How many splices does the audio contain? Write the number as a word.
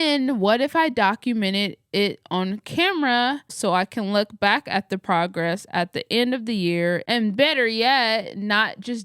one